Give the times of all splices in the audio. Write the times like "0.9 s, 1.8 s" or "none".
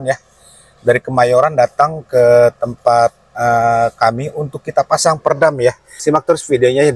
5.9 s